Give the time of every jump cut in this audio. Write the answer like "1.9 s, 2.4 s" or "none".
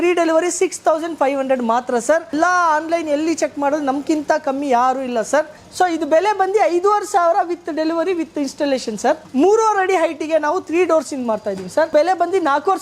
2.3 s, 5.6 s, 9.2 s, 11.9 s